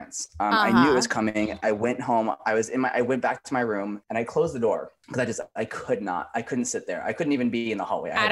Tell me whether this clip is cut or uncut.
uncut